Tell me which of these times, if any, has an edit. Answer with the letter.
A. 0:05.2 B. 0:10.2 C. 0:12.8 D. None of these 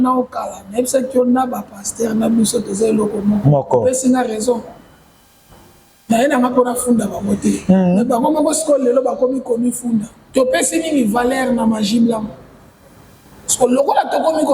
B